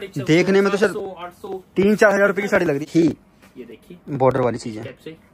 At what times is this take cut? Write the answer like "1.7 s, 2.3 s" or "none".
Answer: 2.8 s